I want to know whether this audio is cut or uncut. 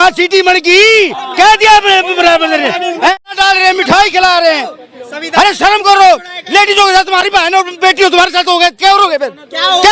cut